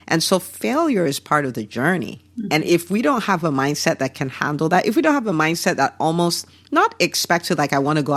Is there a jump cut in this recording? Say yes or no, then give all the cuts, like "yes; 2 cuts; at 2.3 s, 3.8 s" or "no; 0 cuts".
no; 0 cuts